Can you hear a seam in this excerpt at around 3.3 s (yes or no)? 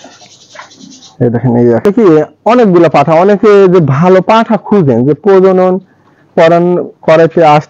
no